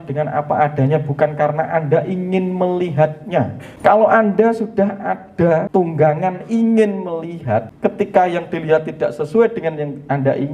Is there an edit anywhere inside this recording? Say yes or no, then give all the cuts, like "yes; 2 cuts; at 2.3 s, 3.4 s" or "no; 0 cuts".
yes; 3 cuts; at 3.6 s, 5.7 s, 7.7 s